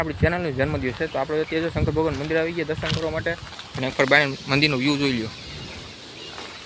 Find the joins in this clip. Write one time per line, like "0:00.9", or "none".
none